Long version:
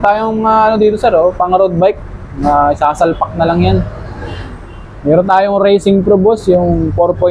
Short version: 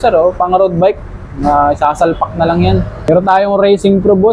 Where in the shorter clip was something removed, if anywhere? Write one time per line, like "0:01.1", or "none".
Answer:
0:03.1